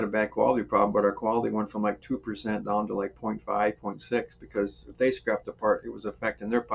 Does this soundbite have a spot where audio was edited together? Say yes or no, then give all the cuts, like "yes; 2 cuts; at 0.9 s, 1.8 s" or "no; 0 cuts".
no; 0 cuts